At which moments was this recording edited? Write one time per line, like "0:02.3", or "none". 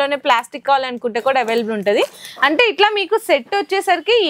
none